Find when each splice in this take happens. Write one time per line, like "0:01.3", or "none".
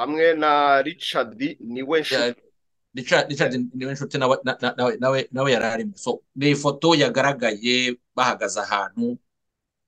none